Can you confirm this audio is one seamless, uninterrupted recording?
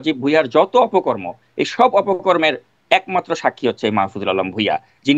yes; 0 cuts

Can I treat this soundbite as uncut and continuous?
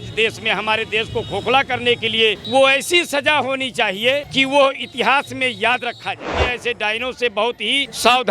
no; 2 cuts; at 2.4 s, 6.4 s

